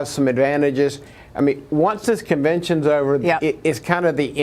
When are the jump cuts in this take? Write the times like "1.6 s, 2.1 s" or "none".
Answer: none